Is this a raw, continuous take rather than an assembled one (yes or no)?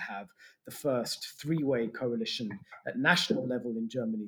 yes